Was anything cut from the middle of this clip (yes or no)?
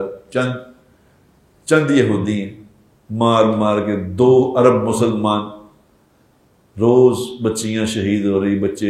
no